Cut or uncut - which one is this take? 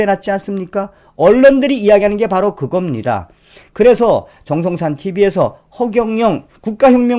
uncut